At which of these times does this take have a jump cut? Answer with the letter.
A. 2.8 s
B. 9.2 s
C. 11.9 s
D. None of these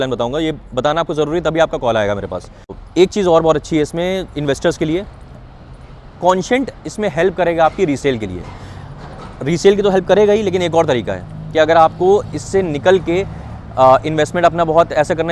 A